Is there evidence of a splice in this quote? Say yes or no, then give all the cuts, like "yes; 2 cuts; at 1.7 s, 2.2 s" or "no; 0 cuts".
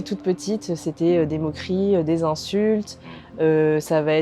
no; 0 cuts